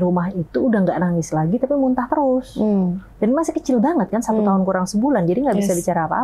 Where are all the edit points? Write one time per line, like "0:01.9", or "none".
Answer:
none